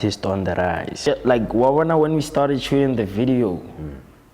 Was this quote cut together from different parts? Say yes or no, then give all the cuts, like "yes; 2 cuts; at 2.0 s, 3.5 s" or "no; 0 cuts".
yes; 1 cut; at 1.0 s